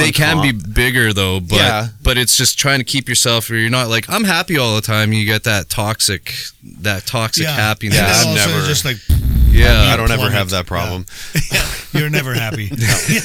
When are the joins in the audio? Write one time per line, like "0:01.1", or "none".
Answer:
none